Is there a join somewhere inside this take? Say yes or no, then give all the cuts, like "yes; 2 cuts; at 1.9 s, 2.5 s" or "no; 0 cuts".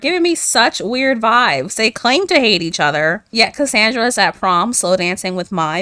no; 0 cuts